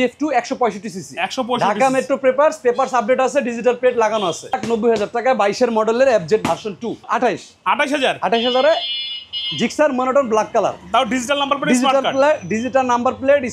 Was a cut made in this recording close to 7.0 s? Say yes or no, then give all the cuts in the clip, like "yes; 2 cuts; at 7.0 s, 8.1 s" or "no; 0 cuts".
yes; 2 cuts; at 4.6 s, 7.0 s